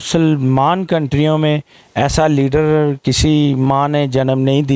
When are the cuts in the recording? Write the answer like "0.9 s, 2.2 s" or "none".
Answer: none